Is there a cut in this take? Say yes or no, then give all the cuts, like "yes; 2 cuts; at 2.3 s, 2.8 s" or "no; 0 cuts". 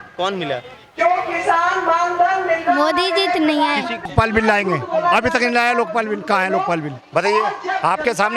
yes; 1 cut; at 4.1 s